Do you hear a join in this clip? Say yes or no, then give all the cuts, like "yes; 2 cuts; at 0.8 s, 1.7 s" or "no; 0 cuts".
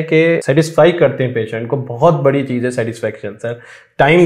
no; 0 cuts